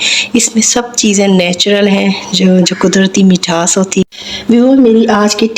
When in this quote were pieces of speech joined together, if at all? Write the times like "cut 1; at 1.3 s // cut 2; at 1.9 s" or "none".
cut 1; at 4.2 s